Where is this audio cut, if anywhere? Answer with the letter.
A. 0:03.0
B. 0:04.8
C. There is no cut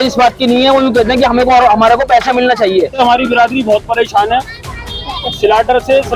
A